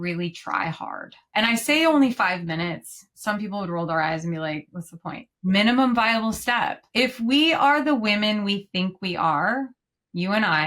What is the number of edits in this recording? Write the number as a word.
three